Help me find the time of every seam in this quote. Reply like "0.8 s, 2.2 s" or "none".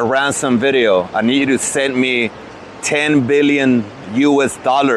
none